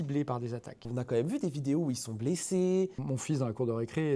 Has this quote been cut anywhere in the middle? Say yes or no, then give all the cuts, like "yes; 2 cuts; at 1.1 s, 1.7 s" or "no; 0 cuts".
yes; 2 cuts; at 0.8 s, 3.0 s